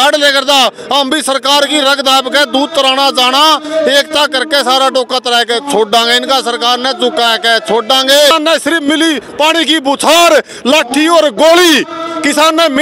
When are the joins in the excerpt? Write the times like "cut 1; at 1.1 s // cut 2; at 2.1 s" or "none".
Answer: cut 1; at 8.3 s